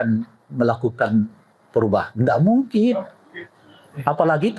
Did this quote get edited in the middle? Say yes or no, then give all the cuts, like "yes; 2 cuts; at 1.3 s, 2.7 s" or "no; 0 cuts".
no; 0 cuts